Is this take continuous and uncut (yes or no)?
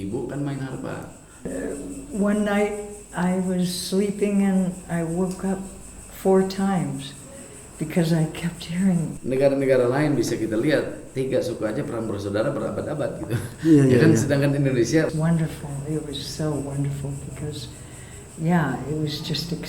no